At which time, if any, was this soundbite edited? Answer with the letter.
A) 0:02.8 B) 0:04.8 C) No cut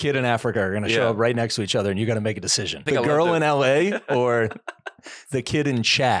A